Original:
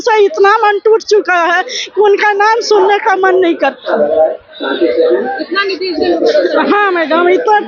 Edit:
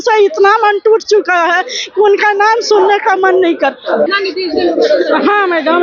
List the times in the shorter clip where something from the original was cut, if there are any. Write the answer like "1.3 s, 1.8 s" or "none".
4.1 s